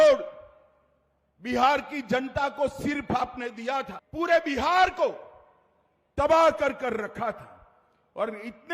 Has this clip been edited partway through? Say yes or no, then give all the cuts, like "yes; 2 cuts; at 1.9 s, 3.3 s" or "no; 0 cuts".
yes; 1 cut; at 4.0 s